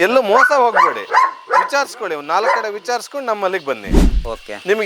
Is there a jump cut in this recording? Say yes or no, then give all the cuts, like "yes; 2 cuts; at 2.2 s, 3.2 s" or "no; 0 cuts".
no; 0 cuts